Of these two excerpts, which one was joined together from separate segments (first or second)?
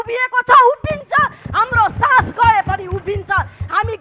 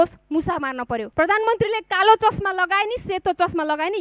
second